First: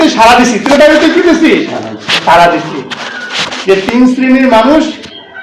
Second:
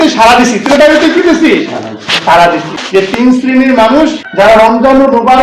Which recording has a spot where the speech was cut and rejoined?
second; 2 cuts; at 3.1 s, 4.2 s

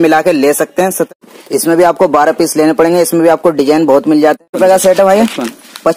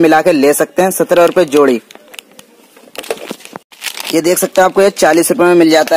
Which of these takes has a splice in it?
first; 2 cuts; at 1.1 s, 4.4 s

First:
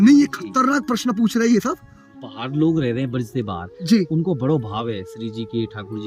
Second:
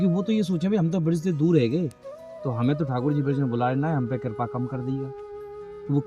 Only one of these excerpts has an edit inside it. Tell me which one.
first; 1 cut; at 2.1 s

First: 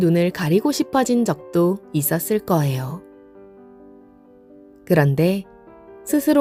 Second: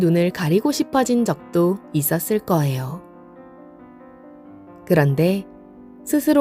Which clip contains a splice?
second; 2 cuts; at 3.0 s, 4.9 s

